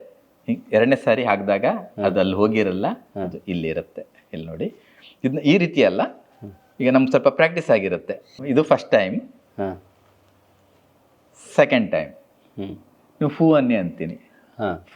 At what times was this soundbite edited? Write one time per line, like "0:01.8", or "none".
0:08.4